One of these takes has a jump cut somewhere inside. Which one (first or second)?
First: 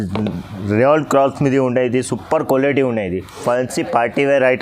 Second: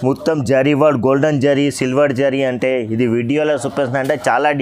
first